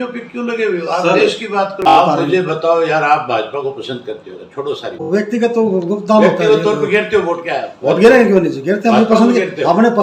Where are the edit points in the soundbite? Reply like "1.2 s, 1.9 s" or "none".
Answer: 1.9 s, 5.0 s